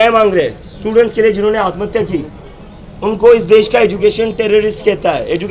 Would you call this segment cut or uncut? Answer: uncut